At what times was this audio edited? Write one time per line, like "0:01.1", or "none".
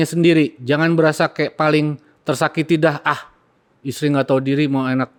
none